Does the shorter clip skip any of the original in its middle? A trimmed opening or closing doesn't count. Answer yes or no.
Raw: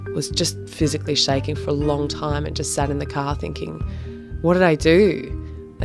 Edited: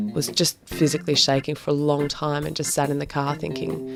no